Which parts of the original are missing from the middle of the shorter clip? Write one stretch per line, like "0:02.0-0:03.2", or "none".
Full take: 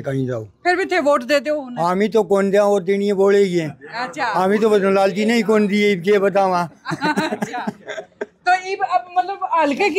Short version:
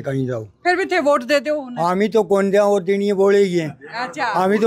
none